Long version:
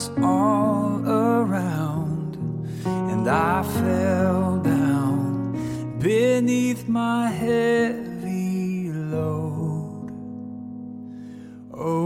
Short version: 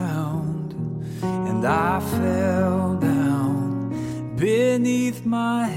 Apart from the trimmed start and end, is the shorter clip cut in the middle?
no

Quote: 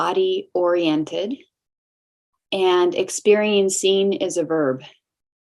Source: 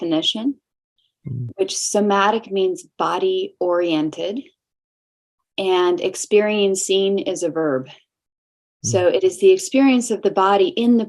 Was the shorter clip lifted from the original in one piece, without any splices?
yes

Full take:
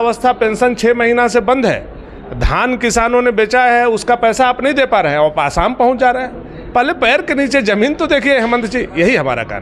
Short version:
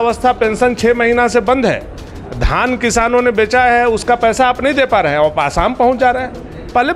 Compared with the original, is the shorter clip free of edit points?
yes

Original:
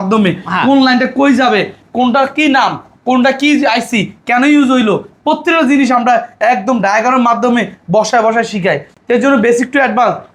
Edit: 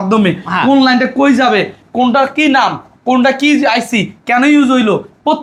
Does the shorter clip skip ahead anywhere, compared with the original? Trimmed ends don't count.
no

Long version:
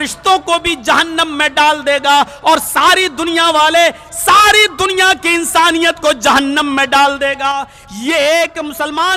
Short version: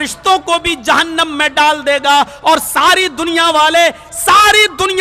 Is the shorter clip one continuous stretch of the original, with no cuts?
yes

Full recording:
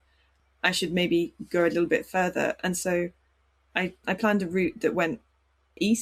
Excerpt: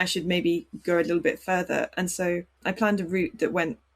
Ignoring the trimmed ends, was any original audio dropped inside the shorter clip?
yes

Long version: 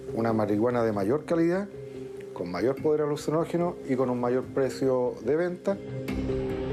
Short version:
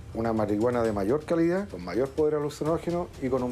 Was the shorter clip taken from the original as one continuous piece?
no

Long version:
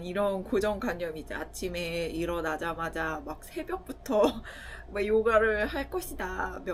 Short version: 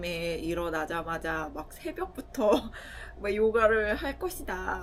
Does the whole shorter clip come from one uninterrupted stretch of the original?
yes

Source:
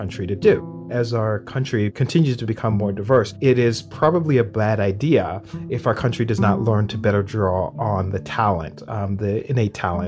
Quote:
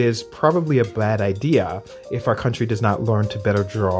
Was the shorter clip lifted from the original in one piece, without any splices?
yes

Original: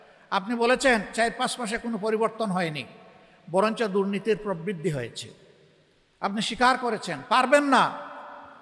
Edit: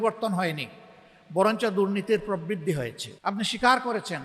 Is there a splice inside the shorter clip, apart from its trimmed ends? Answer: yes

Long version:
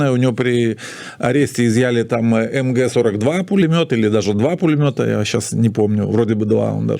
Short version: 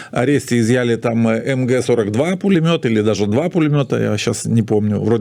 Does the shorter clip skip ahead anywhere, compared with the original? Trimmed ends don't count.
no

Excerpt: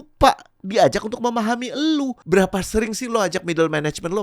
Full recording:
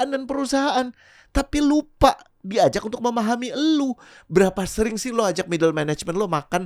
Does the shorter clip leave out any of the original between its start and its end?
yes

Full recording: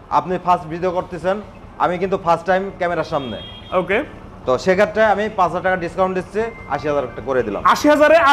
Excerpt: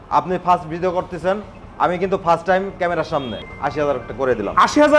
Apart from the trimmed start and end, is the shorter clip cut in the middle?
yes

